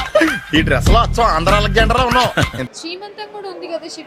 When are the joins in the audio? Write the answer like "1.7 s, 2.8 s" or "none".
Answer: 2.7 s